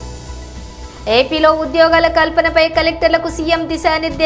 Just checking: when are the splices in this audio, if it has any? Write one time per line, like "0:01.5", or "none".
0:00.9